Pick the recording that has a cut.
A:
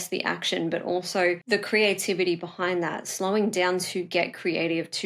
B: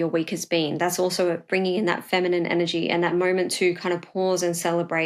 A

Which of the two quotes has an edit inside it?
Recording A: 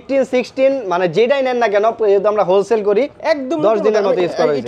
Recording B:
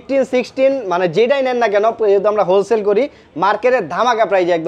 A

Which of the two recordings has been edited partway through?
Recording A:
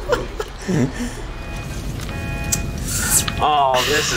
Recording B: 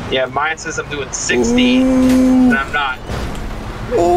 A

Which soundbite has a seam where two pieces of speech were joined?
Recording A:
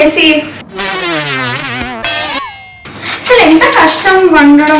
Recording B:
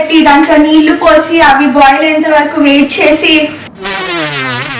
A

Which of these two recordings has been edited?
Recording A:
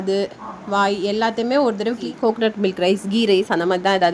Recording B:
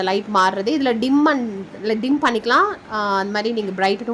A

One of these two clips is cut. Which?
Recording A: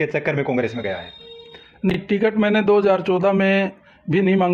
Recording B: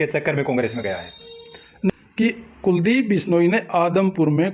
B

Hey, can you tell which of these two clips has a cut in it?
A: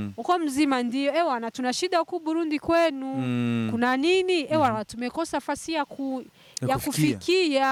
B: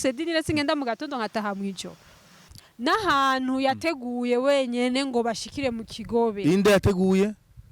B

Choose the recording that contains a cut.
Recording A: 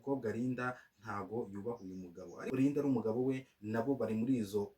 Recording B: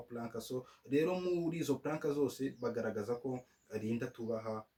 A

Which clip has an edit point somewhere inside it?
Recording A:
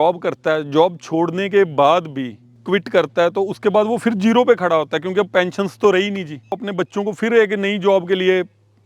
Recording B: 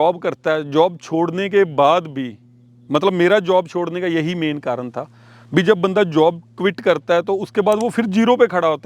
A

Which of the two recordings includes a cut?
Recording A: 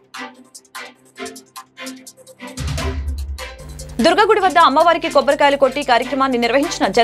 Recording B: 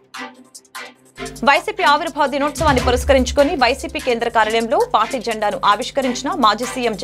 B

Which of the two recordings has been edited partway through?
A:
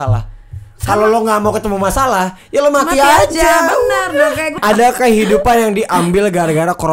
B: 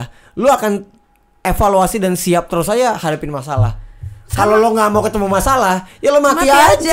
A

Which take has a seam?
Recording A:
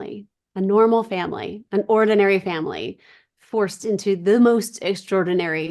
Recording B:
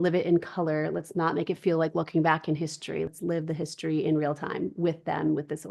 B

